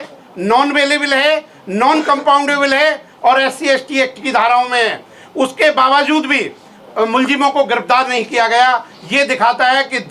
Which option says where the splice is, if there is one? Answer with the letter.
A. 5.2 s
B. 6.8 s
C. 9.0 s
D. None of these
D